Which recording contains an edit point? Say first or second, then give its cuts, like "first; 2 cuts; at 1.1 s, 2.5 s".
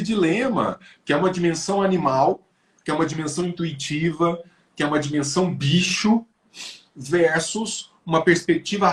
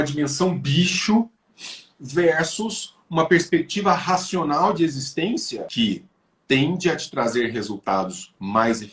second; 1 cut; at 5.7 s